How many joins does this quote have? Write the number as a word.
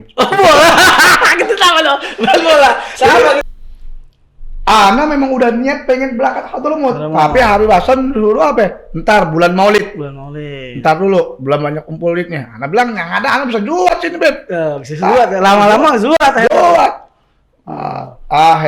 one